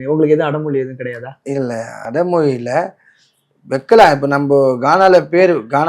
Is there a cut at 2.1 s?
no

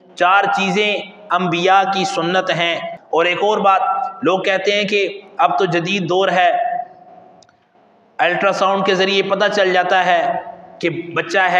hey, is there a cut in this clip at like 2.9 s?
yes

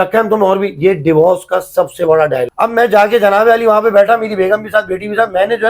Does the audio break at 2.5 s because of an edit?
yes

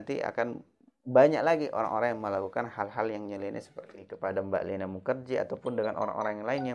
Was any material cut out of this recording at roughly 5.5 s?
no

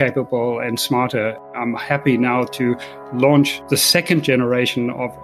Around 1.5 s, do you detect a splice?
yes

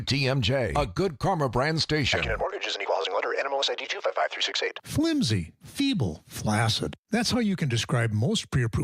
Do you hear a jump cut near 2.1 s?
yes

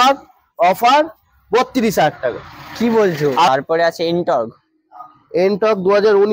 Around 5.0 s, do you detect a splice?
no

